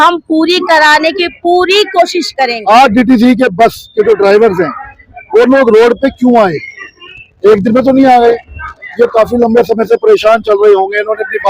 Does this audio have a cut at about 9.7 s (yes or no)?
no